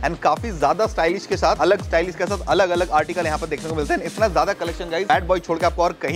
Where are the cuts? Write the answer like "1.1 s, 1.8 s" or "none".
1.6 s, 5.1 s